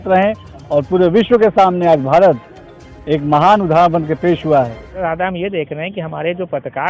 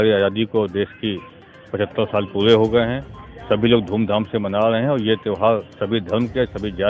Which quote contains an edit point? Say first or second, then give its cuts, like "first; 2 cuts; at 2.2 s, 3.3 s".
first; 1 cut; at 5.0 s